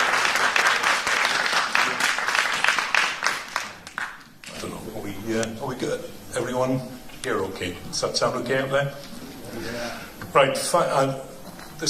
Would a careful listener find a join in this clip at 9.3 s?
yes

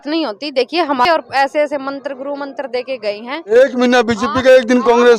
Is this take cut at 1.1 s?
yes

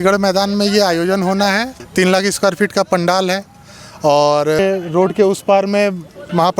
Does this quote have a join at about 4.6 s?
yes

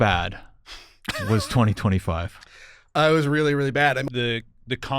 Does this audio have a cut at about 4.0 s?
yes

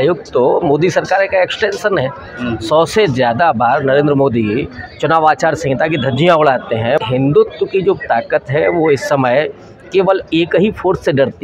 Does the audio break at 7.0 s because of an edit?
yes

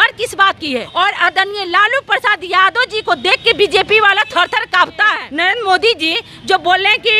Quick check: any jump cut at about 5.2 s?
yes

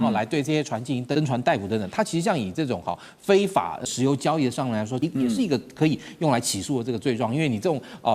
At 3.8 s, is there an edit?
yes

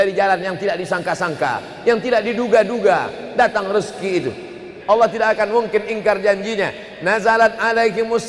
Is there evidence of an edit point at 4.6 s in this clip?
yes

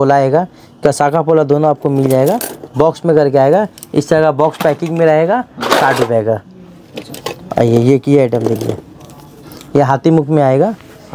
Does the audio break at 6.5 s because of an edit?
no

